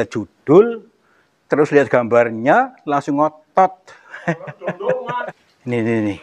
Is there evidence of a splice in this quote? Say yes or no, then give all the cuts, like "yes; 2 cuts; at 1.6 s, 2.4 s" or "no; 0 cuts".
yes; 1 cut; at 5.3 s